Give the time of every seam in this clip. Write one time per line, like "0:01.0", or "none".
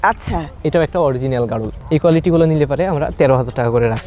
0:01.7